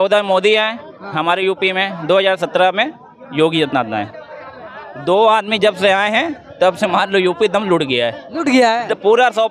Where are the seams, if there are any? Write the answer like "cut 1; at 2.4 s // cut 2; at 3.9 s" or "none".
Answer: none

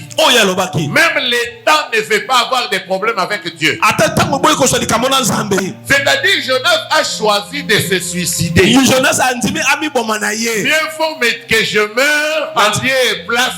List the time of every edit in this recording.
cut 1; at 5.6 s

